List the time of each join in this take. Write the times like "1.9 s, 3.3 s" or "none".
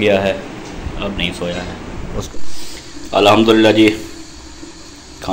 2.3 s